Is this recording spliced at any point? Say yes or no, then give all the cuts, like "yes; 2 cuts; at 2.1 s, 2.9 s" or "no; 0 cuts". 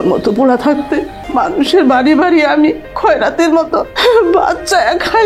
yes; 2 cuts; at 1.2 s, 3.9 s